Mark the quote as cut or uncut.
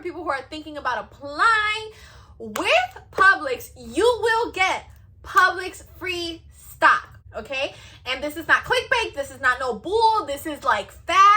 cut